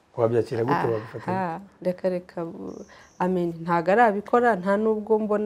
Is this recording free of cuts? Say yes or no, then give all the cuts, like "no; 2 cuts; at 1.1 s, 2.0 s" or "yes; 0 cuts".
yes; 0 cuts